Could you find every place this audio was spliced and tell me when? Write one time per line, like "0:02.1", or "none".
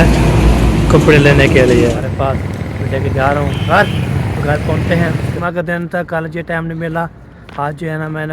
0:02.0
0:05.4